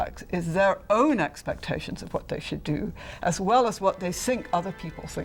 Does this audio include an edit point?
no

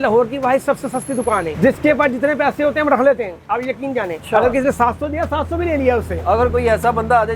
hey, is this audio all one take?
no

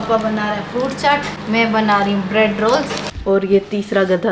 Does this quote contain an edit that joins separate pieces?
yes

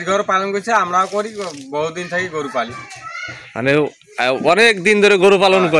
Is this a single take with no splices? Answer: yes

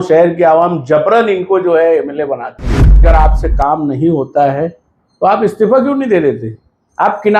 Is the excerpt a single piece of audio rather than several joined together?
no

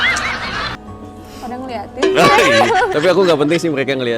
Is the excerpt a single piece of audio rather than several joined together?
no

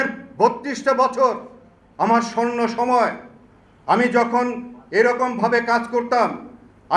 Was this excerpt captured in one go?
yes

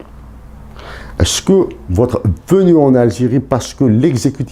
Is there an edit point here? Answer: no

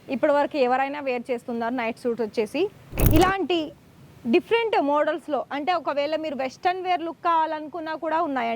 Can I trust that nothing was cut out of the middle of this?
no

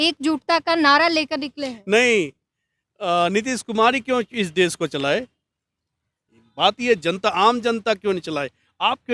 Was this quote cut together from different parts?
no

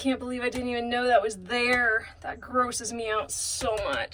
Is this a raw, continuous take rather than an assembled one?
yes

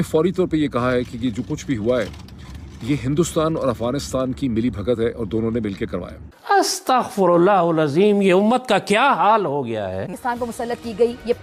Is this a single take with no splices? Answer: yes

